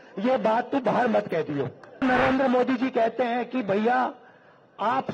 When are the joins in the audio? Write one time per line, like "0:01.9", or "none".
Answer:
0:02.0